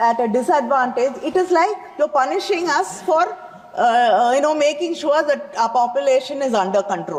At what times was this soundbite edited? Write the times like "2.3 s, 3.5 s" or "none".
none